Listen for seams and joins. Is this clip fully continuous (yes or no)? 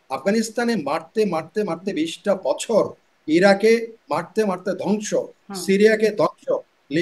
yes